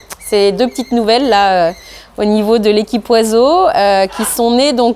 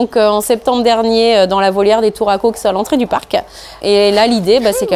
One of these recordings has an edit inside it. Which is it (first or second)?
second